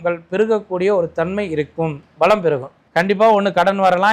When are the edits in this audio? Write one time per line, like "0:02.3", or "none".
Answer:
0:02.8